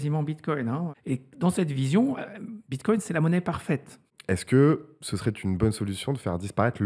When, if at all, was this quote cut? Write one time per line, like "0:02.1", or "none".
0:00.9
0:04.1